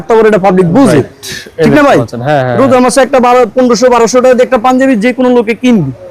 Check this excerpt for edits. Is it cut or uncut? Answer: uncut